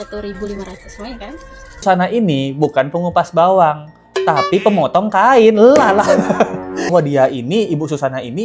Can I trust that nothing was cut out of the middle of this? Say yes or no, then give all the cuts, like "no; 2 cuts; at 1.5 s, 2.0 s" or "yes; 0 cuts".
no; 2 cuts; at 1.8 s, 6.9 s